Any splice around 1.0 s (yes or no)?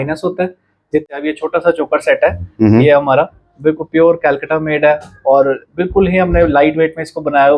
yes